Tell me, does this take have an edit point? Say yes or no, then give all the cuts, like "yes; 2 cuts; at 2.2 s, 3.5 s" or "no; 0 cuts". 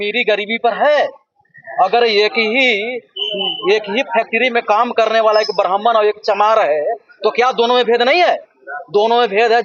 no; 0 cuts